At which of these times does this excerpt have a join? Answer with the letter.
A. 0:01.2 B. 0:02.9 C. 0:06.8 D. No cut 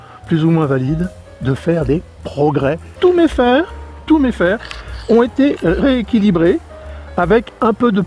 B